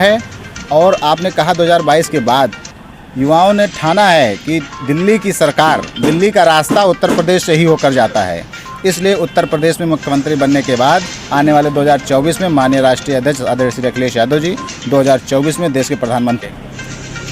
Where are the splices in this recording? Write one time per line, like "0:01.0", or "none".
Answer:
0:16.4